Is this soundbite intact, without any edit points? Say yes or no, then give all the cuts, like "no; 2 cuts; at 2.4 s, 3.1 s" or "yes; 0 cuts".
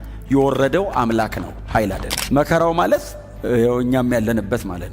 no; 1 cut; at 2.1 s